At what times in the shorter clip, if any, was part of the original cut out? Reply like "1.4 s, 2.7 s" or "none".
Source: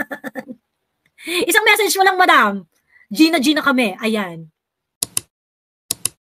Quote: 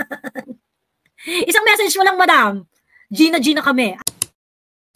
4.0 s